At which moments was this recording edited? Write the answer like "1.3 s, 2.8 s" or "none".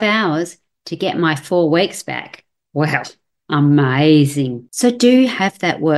4.6 s